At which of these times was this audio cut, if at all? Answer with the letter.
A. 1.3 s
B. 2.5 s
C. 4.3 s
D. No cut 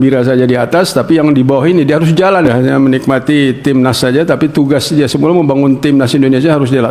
B